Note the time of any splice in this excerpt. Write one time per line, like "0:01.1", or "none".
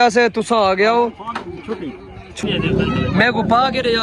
0:02.4